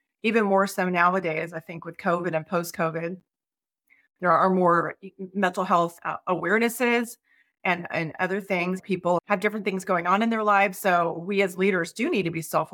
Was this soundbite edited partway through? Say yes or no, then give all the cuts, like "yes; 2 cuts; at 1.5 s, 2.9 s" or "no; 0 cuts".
yes; 1 cut; at 9.2 s